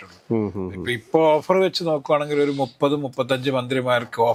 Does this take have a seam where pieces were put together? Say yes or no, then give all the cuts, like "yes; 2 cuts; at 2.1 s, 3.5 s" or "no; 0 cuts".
no; 0 cuts